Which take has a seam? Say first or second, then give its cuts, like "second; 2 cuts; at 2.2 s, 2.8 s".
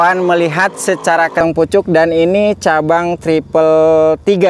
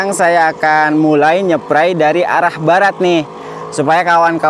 first; 1 cut; at 1.4 s